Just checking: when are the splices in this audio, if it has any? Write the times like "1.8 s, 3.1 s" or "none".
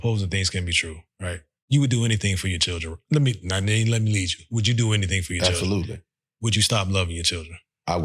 1.5 s